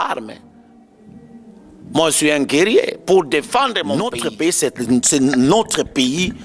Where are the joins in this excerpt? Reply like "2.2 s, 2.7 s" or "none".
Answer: 4.1 s